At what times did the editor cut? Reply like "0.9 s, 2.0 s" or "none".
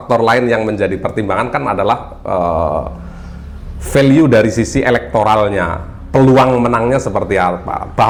none